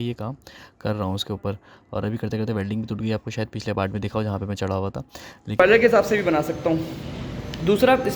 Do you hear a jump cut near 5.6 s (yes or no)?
yes